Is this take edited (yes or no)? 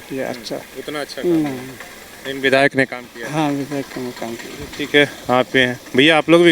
no